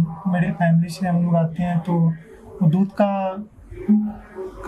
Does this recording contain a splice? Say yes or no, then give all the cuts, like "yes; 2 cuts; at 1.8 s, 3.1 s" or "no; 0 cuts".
no; 0 cuts